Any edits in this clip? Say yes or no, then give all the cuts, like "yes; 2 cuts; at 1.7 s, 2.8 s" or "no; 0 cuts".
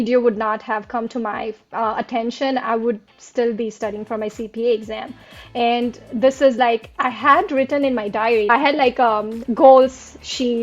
yes; 1 cut; at 8.5 s